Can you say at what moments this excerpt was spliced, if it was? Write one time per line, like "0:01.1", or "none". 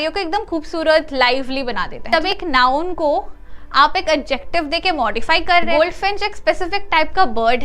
0:02.1
0:05.7